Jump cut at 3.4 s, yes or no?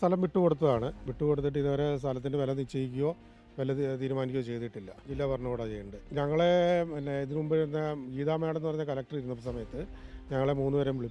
no